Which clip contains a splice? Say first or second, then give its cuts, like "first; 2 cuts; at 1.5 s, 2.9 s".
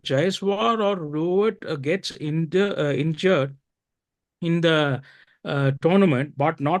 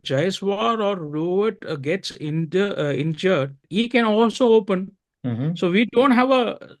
second; 1 cut; at 3.6 s